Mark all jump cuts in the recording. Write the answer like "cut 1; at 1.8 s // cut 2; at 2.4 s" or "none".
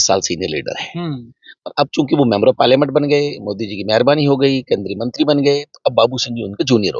none